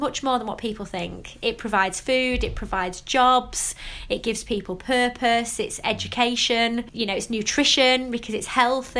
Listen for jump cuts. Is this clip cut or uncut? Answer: cut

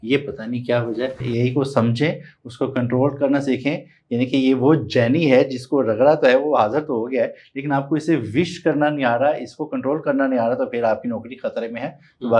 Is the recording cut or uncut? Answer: cut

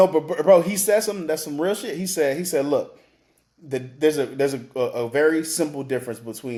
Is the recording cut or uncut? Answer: uncut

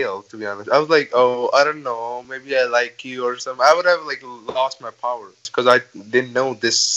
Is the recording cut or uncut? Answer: cut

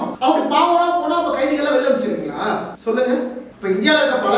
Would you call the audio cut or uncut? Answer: uncut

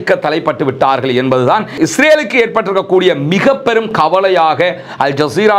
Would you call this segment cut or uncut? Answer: uncut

